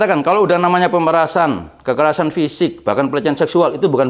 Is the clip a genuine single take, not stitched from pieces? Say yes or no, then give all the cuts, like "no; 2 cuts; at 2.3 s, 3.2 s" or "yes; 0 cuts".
yes; 0 cuts